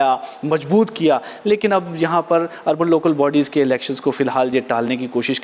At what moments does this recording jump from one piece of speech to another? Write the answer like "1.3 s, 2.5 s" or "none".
none